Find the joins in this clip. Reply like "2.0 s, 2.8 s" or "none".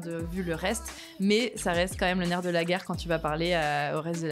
none